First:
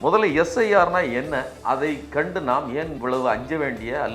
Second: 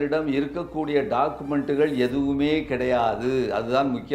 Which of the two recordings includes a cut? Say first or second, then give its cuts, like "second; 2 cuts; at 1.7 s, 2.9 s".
first; 2 cuts; at 1.5 s, 2.9 s